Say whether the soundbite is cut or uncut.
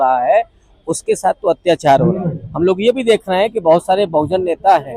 uncut